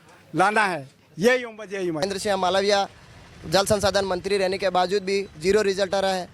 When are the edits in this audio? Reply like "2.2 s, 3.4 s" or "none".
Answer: 2.0 s